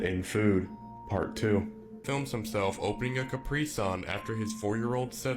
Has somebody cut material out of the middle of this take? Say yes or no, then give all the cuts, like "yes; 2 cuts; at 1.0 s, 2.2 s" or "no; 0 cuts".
yes; 1 cut; at 2.0 s